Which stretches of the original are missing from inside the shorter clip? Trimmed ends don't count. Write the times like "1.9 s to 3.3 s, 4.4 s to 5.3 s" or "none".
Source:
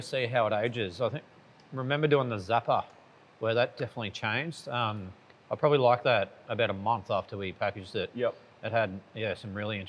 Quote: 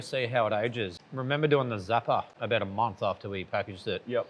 0.9 s to 1.5 s, 2.9 s to 6.4 s